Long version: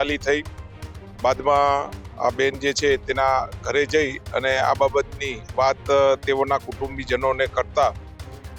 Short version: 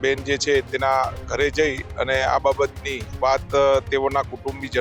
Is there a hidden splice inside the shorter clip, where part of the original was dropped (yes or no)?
no